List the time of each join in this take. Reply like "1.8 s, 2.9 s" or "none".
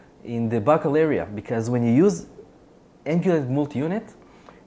none